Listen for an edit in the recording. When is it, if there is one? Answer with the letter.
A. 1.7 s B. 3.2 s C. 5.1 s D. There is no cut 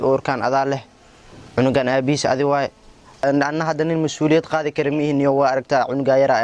B